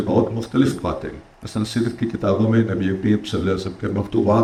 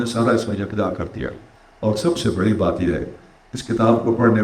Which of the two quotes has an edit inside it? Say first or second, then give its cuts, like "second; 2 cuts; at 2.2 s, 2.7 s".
second; 1 cut; at 1.4 s